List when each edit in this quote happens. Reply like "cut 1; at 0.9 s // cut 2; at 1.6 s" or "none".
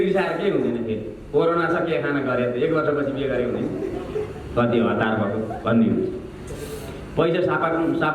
none